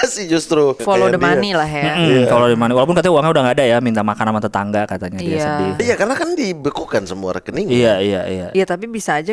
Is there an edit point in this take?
yes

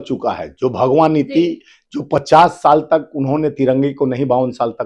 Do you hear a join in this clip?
no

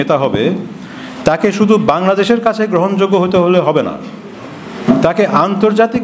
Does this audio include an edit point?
no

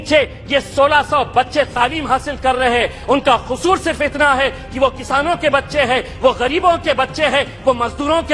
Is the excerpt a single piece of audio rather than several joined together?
yes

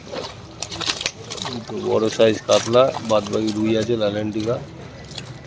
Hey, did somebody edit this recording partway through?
no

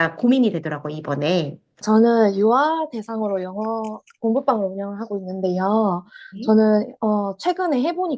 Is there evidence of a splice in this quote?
yes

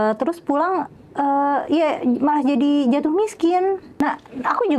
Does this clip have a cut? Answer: yes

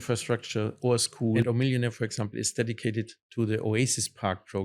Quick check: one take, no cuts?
no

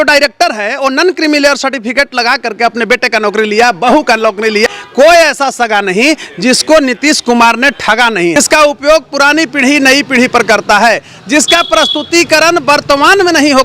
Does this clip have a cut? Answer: yes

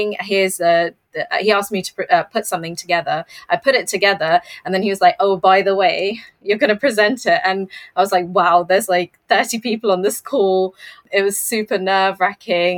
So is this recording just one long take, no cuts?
no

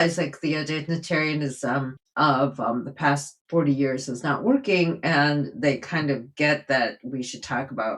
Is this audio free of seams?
no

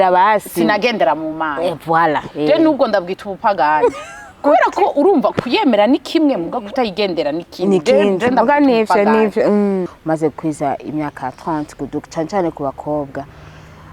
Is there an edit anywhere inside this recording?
yes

